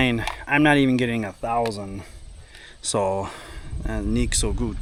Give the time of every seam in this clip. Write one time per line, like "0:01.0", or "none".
none